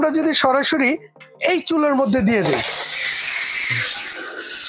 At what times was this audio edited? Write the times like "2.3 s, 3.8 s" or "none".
none